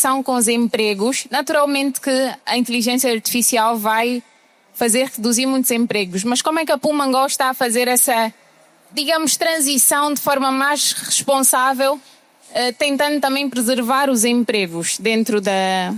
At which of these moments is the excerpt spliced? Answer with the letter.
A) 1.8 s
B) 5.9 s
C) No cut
C